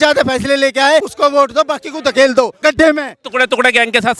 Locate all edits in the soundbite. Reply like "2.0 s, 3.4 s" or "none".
1.1 s, 2.6 s